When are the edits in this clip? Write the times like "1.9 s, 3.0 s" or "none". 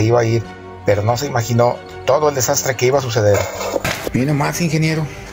4.0 s